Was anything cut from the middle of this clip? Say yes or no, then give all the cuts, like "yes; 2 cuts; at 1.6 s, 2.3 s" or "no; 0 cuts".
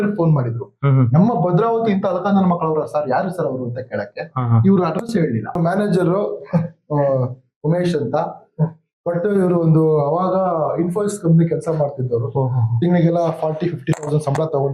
yes; 1 cut; at 5.6 s